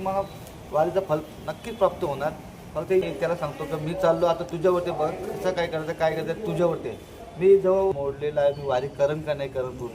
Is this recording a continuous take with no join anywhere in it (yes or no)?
no